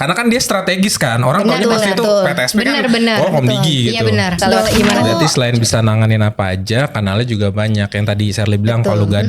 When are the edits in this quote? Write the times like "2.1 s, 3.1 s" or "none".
5.2 s